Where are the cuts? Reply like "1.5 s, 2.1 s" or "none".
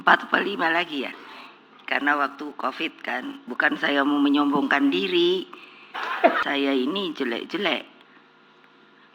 6.4 s